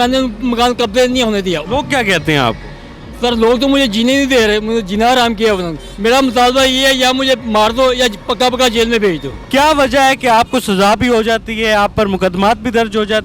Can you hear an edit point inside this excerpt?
yes; 2 cuts; at 1.6 s, 9.3 s

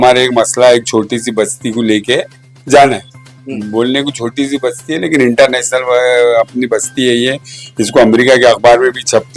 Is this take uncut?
yes; 0 cuts

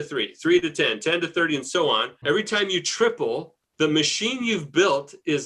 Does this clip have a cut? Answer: yes; 1 cut; at 2.2 s

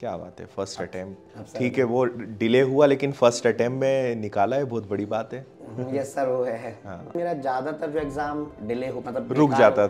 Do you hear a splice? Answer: yes; 2 cuts; at 7.1 s, 8.5 s

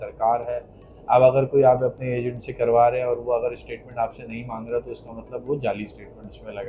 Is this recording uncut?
yes; 0 cuts

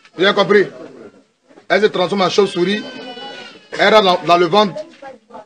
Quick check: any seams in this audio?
no; 0 cuts

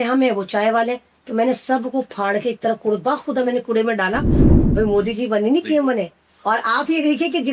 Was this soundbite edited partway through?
yes; 1 cut; at 4.4 s

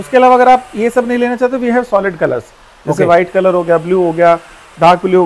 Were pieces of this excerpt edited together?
no; 0 cuts

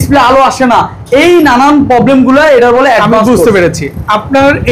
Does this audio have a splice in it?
no; 0 cuts

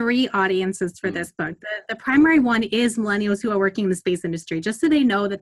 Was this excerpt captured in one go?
yes; 0 cuts

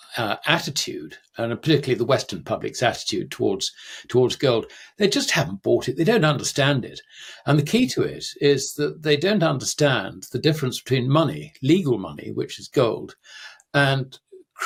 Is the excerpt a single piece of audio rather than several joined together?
yes; 0 cuts

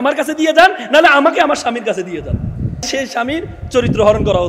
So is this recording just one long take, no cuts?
no; 1 cut; at 2.9 s

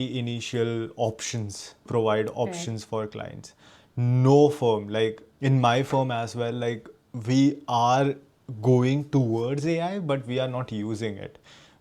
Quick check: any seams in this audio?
yes; 2 cuts; at 1.9 s, 5.3 s

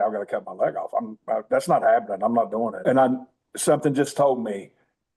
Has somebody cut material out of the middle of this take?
yes; 1 cut; at 2.8 s

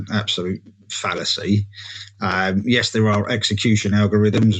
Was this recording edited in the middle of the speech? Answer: no; 0 cuts

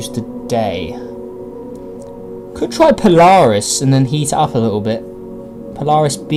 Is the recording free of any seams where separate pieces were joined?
yes; 0 cuts

